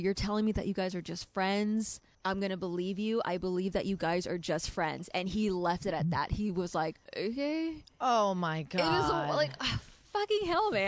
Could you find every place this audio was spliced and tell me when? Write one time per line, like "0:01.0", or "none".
none